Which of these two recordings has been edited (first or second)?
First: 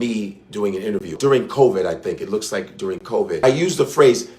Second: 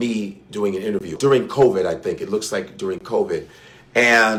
first